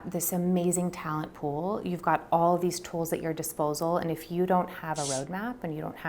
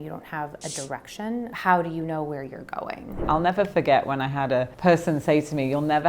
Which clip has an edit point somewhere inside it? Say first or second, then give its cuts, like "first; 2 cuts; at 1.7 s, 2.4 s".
second; 3 cuts; at 1.5 s, 3.2 s, 4.7 s